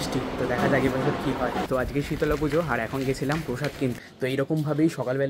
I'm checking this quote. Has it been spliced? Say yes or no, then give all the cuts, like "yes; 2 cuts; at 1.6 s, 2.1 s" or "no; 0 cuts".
yes; 2 cuts; at 1.7 s, 4.1 s